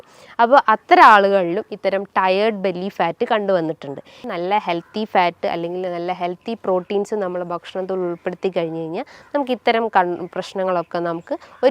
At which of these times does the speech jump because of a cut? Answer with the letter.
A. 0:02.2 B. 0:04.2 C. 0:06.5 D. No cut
B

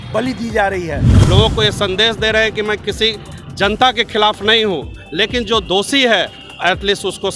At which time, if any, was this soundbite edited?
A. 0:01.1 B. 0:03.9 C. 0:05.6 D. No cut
A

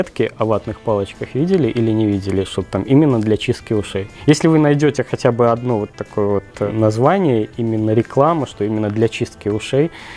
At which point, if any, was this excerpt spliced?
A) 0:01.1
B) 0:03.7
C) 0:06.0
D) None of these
D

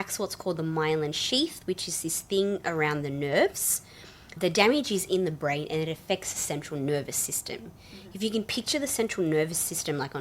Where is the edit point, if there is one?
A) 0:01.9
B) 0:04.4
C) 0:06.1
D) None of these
B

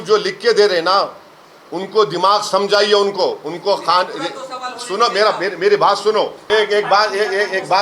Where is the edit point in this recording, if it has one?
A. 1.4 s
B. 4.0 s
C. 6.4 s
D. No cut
C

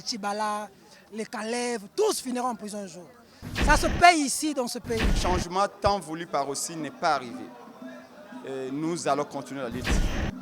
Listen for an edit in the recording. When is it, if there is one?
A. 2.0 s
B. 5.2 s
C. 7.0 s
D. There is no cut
B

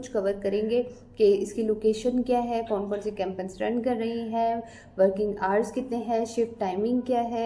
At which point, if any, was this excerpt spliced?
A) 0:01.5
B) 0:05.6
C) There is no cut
C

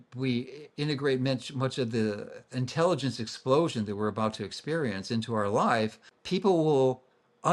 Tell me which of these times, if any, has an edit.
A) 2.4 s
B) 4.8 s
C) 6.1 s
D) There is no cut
C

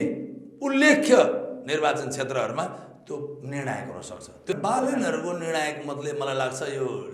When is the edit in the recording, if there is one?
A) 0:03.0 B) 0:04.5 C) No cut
B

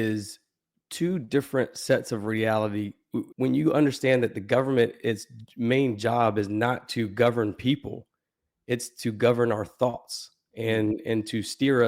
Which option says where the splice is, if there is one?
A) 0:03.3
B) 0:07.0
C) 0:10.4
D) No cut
A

